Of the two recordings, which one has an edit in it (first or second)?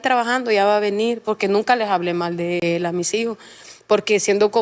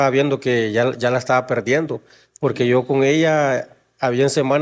first